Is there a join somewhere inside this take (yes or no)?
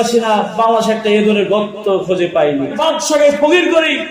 yes